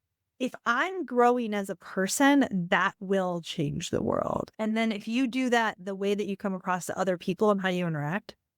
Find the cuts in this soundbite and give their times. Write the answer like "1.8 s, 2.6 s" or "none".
4.5 s